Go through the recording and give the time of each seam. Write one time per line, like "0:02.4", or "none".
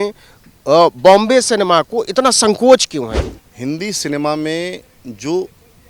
0:03.2